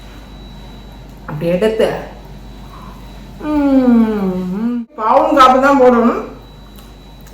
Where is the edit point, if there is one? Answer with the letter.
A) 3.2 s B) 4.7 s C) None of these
B